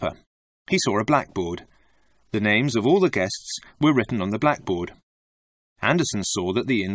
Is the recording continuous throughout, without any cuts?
no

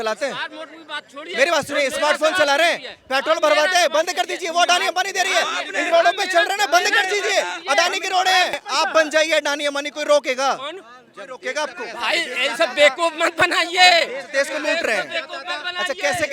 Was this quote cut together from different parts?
yes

